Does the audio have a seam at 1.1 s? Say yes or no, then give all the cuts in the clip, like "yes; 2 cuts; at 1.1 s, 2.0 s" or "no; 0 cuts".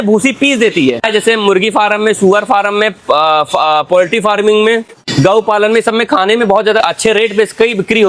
yes; 3 cuts; at 1.1 s, 5.0 s, 6.8 s